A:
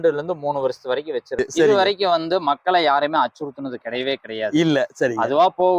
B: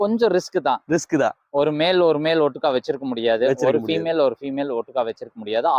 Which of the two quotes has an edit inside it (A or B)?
A